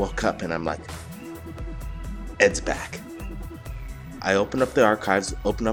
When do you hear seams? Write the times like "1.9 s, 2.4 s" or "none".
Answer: 4.3 s